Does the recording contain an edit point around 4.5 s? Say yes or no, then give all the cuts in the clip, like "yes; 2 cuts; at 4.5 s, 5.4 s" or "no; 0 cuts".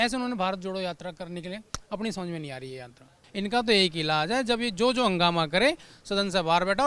no; 1 cut; at 3.2 s